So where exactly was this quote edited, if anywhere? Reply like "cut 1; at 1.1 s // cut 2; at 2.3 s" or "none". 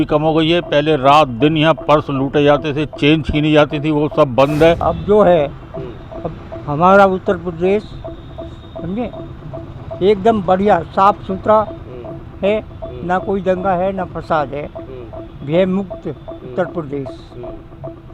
cut 1; at 4.8 s